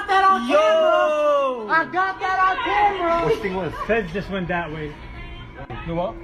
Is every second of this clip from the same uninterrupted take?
yes; 0 cuts

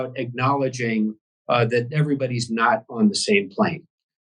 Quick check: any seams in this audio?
no; 0 cuts

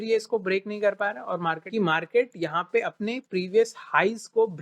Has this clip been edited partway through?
yes; 1 cut; at 1.6 s

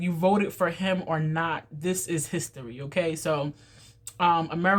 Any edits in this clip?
no; 0 cuts

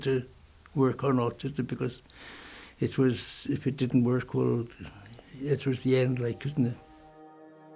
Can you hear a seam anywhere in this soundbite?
yes; 1 cut; at 6.8 s

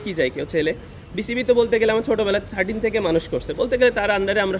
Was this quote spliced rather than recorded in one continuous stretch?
no; 0 cuts

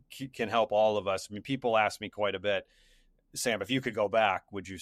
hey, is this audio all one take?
yes; 0 cuts

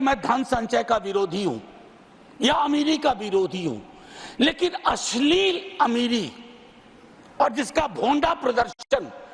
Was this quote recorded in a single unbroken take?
yes; 0 cuts

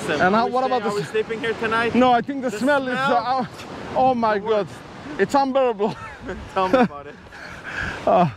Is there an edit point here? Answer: no; 0 cuts

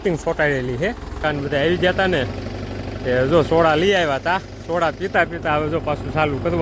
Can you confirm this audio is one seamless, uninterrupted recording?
no; 1 cut; at 1.2 s

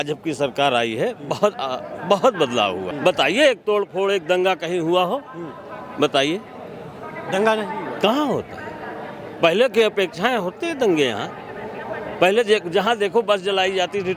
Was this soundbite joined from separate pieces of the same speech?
yes; 1 cut; at 2.9 s

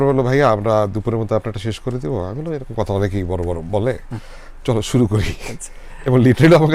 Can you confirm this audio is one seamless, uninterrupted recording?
yes; 0 cuts

